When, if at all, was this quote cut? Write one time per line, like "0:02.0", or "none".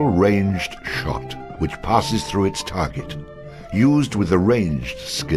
none